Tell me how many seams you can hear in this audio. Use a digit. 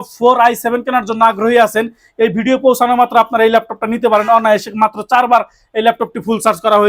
0